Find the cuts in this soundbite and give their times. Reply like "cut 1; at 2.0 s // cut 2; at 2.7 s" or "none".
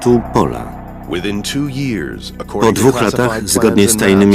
cut 1; at 1.4 s